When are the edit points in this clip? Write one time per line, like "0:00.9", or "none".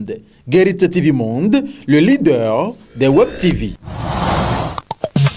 0:03.9